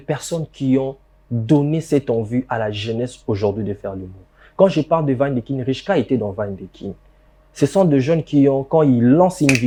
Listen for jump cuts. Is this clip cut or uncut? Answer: uncut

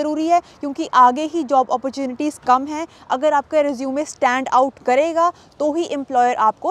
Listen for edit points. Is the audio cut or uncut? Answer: uncut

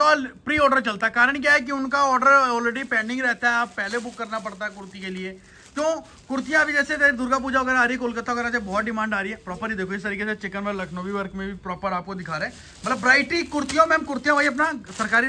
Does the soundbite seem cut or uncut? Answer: uncut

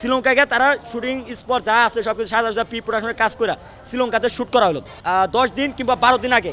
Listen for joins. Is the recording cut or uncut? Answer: cut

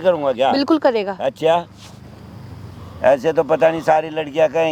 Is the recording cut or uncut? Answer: uncut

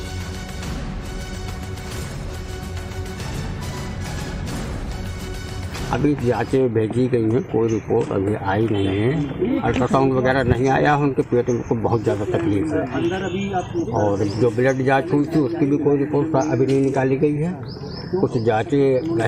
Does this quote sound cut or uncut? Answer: uncut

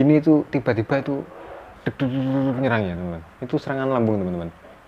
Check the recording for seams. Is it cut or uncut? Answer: uncut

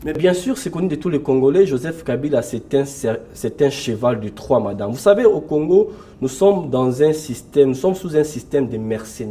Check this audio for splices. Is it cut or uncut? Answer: uncut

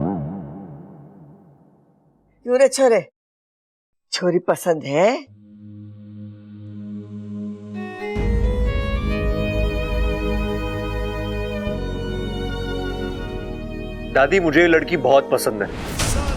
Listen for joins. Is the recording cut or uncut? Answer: cut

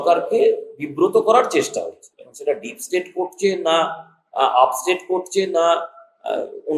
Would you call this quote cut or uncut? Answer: uncut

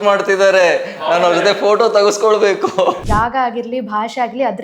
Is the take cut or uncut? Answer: cut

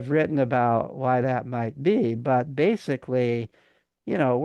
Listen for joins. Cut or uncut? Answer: uncut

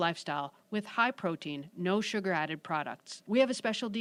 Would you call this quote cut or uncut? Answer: uncut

